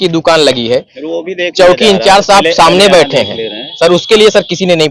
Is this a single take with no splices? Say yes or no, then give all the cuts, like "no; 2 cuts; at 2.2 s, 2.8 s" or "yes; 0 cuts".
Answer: yes; 0 cuts